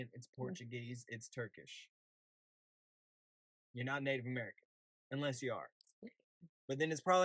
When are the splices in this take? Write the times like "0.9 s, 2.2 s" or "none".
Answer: none